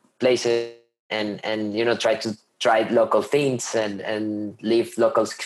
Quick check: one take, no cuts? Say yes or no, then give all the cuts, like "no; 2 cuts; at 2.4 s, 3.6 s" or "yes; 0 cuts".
yes; 0 cuts